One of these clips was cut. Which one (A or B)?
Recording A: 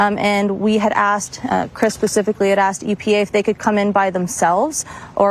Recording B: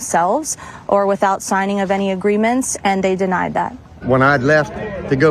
B